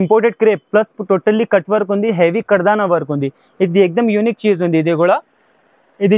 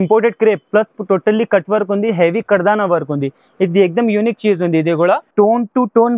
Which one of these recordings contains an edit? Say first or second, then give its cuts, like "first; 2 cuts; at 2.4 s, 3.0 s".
second; 1 cut; at 5.3 s